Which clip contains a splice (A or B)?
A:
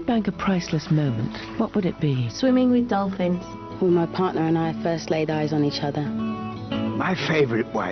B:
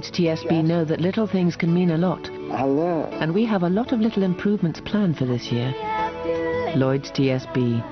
A